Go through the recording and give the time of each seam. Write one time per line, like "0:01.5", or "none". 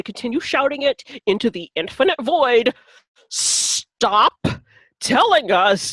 none

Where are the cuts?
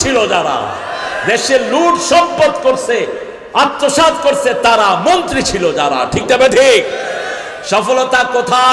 none

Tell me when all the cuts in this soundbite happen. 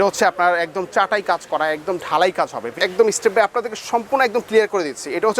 0:02.7

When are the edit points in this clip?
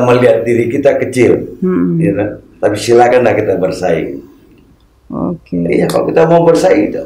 none

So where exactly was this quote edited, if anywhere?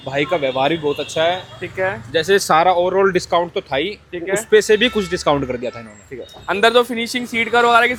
none

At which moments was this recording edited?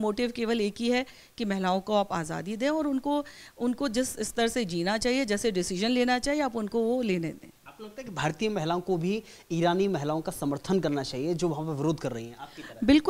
none

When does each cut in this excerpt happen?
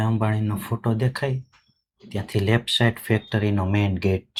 none

